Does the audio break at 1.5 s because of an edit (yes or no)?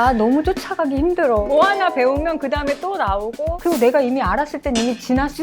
yes